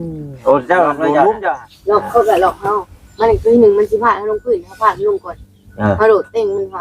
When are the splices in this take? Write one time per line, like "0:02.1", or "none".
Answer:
0:01.7